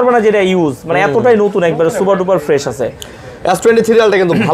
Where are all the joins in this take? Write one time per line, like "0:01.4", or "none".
none